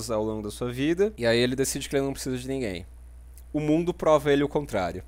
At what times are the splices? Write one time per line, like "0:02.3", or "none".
0:01.2